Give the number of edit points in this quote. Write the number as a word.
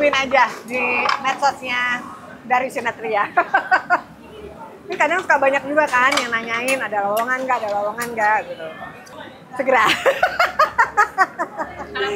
zero